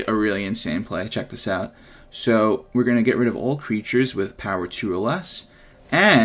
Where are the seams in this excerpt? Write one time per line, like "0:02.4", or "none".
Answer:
none